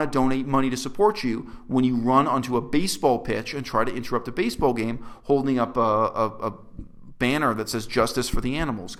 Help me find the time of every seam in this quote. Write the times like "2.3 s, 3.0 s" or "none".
none